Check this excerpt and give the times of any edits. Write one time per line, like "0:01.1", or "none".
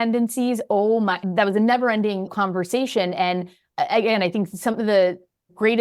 0:01.2